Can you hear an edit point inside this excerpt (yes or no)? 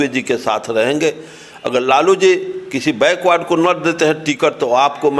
no